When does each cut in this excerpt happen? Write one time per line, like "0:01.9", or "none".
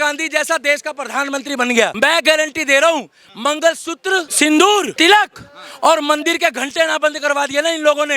0:01.9
0:04.3
0:04.9